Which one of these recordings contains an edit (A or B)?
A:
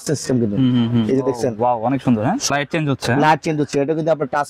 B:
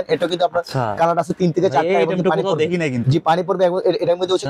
A